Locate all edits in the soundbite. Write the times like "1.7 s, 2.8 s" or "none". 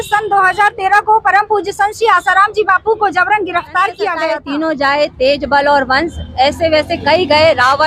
4.3 s